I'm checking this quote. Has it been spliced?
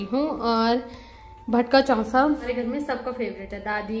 no; 0 cuts

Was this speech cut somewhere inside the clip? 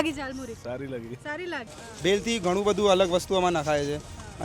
yes; 1 cut; at 1.7 s

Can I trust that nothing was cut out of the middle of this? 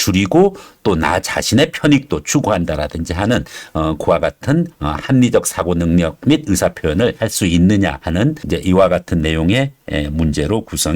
yes; 0 cuts

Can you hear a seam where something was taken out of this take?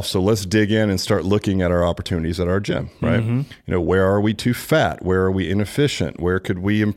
no; 0 cuts

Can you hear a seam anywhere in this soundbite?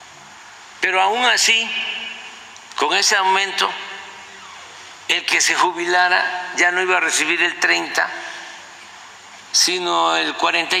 no; 0 cuts

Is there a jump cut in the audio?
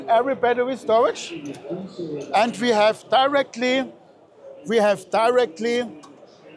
no; 0 cuts

